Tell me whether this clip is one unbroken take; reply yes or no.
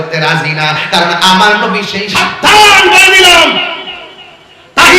no